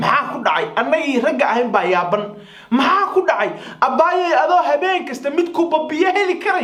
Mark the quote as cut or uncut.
uncut